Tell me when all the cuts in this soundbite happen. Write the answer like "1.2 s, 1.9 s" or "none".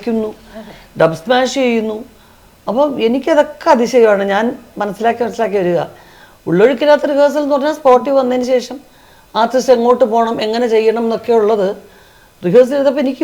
none